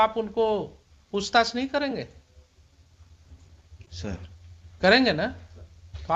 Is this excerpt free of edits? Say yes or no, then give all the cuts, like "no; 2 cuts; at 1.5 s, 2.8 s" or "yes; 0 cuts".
yes; 0 cuts